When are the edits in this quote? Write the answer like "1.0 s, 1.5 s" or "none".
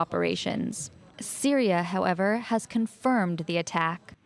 3.2 s